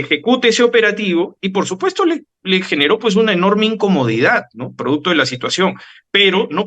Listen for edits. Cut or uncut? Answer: uncut